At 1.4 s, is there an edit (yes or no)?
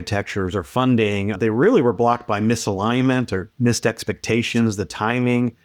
yes